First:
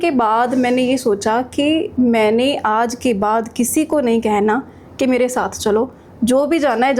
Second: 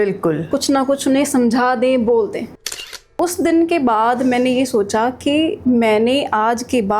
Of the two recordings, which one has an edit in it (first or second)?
second